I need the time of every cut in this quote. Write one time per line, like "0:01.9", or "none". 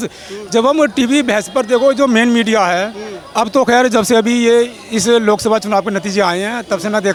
none

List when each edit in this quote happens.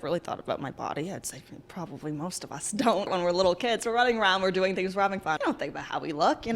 0:03.1
0:05.4

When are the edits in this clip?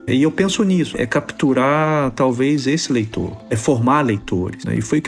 0:00.9

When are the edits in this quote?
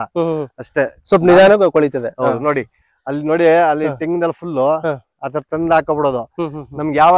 none

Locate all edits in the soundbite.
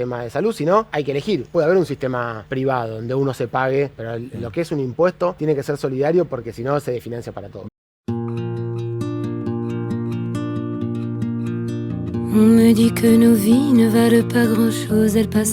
0:01.4
0:02.4
0:04.0
0:05.4
0:07.6

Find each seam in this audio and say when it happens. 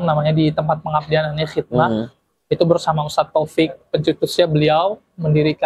none

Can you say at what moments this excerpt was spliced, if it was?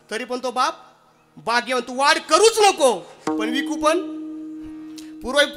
none

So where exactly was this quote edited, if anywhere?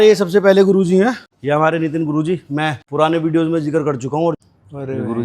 0:01.3
0:02.8
0:04.4

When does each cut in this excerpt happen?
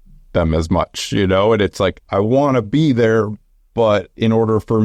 0:02.0

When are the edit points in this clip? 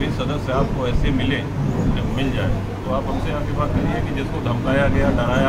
none

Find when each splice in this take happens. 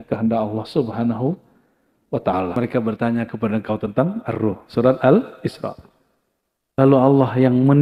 0:02.6

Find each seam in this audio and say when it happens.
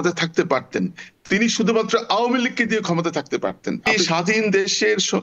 0:03.9

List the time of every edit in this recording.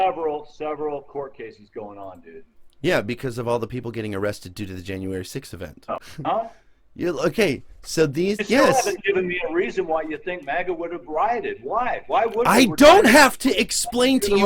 0:06.1

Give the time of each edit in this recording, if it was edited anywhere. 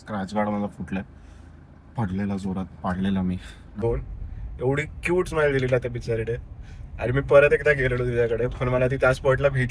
0:03.8

